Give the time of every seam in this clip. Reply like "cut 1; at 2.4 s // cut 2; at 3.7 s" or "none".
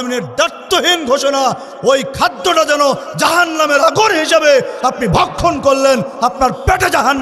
none